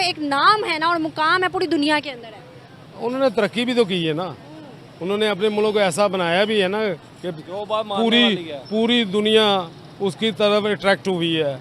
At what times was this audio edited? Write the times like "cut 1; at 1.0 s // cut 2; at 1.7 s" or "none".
none